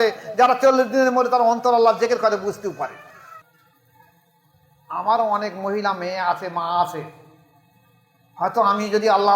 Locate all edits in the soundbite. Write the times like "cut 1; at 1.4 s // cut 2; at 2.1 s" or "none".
cut 1; at 3.4 s